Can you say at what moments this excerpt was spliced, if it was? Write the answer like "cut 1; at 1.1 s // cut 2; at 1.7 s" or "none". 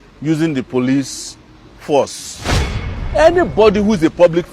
cut 1; at 2.8 s